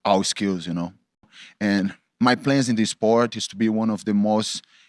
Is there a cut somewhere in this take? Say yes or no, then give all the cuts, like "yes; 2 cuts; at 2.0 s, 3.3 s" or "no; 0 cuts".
yes; 1 cut; at 1.3 s